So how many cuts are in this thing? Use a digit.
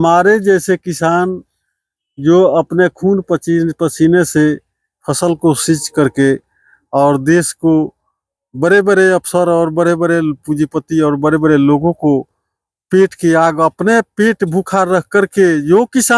0